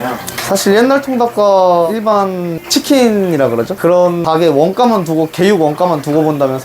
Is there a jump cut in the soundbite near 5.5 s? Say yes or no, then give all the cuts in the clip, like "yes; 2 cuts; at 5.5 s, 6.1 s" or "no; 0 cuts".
no; 2 cuts; at 1.9 s, 3.7 s